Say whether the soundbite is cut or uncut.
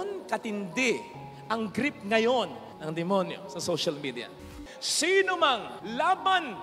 cut